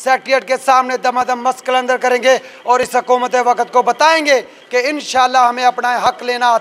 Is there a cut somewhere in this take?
no; 0 cuts

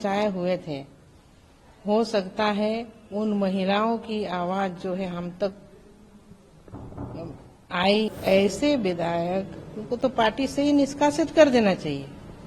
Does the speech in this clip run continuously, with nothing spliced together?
no; 1 cut; at 8.1 s

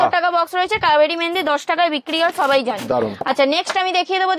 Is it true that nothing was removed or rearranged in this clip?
yes; 0 cuts

